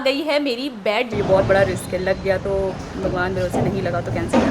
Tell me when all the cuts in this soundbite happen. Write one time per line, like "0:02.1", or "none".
0:01.1